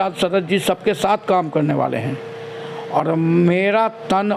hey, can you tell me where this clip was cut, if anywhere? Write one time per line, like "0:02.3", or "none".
none